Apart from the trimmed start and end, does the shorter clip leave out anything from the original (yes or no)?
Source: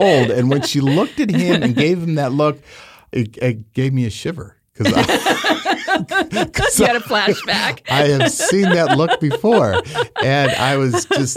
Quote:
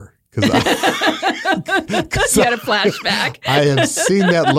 no